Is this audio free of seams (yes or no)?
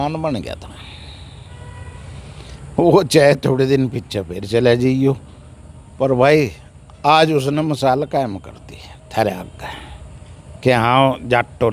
yes